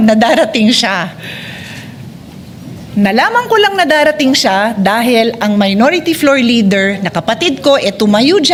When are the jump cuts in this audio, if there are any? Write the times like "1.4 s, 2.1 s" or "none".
none